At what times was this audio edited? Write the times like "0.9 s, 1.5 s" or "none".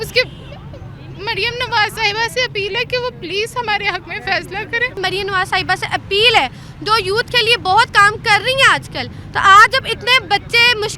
5.0 s